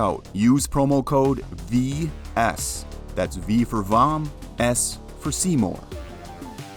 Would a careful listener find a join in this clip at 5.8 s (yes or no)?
yes